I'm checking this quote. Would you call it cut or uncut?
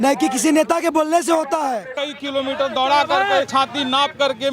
cut